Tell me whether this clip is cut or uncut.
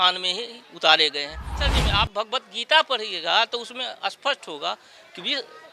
cut